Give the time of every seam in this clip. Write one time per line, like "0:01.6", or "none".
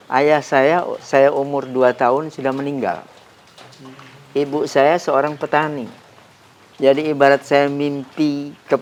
none

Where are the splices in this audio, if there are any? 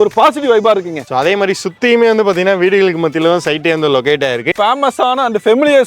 0:01.0
0:04.5

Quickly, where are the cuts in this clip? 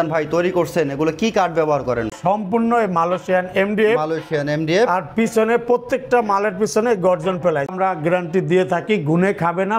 0:02.1
0:07.7

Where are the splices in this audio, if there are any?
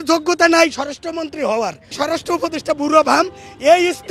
0:02.0

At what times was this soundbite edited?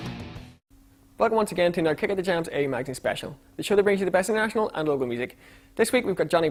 none

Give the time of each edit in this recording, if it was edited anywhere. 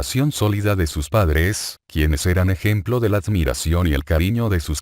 0:02.2

